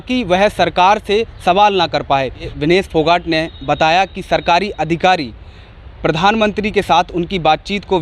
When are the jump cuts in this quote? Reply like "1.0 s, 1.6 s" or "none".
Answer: 2.5 s